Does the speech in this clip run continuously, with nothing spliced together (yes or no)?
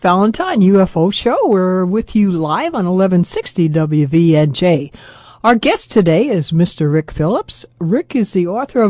yes